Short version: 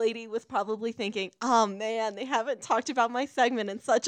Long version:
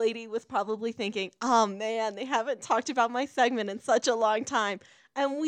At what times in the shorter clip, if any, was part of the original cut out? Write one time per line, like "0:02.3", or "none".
none